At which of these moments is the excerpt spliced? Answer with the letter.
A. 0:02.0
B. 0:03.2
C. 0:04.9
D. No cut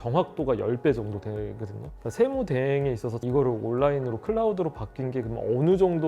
B